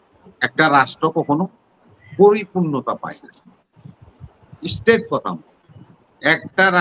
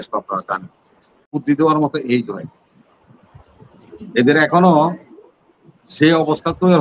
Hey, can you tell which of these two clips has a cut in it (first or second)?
second